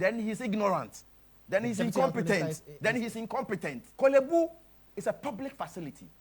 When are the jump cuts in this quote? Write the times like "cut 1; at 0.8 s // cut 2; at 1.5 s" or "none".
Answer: cut 1; at 3.8 s